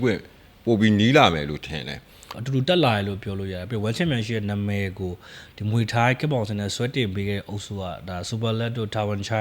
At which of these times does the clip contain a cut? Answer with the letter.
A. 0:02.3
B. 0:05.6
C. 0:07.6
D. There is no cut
A